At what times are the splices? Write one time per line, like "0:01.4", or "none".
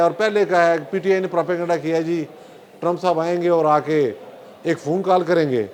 none